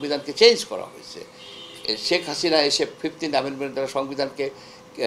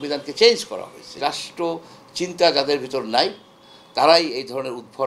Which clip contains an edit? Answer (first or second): second